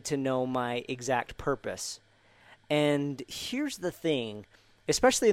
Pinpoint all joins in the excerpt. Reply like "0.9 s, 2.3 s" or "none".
none